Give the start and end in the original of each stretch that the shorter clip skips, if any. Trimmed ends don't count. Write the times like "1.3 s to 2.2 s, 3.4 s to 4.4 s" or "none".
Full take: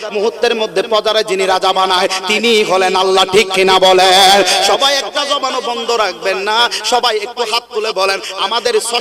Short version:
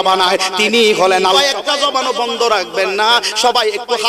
3.1 s to 4.8 s

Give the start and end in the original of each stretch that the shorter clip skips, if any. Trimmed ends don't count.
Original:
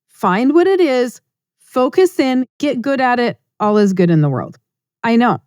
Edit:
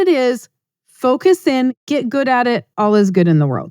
3.4 s to 3.5 s

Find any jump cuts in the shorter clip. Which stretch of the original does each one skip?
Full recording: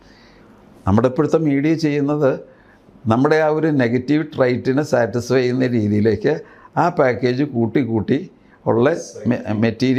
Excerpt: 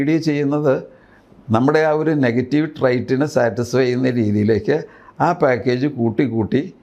none

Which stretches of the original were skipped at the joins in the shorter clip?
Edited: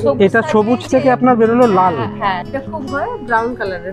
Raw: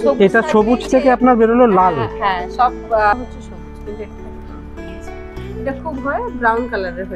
2.5 s to 5.6 s

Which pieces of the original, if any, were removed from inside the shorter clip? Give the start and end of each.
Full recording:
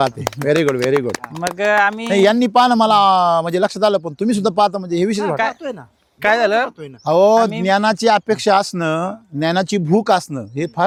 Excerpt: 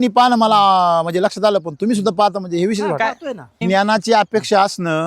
6.0 s to 7.5 s

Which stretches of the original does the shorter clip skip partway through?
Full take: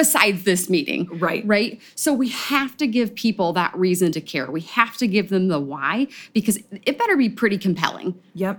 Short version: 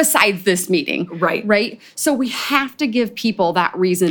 none

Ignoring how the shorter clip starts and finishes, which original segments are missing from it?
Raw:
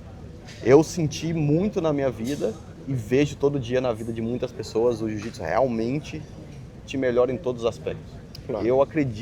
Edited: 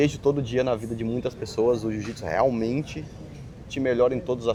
none

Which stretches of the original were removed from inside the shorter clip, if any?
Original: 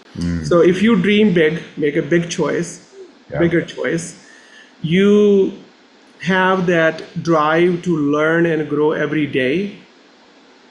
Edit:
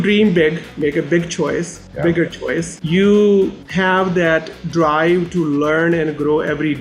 2.8 s to 3.2 s, 4.1 s to 4.8 s, 5.6 s to 6.1 s

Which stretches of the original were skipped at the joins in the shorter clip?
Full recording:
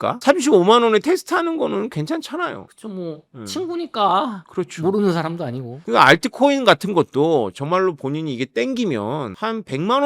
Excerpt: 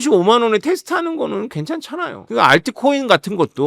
2.6 s to 5.7 s

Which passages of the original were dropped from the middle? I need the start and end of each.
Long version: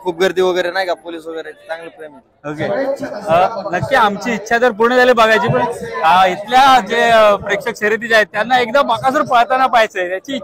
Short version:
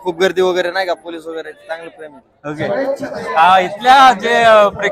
3.1 s to 5.8 s

